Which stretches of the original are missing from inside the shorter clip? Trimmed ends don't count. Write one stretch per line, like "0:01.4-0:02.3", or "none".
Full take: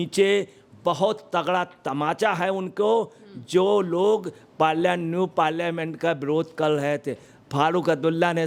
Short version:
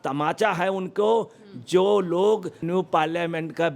0:04.4-0:05.1